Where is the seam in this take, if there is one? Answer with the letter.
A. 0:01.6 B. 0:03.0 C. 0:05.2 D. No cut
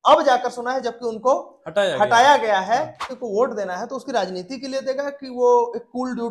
B